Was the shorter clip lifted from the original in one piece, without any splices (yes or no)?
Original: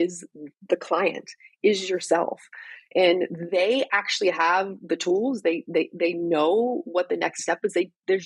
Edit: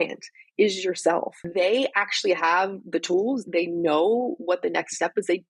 no